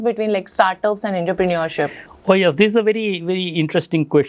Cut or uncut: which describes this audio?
uncut